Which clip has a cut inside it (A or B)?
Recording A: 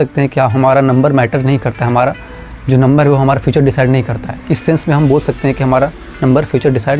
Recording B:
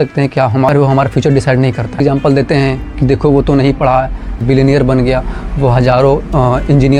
B